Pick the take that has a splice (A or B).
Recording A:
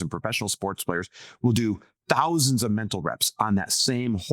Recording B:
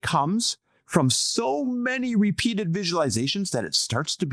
A